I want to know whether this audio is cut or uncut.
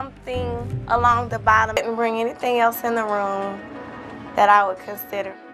cut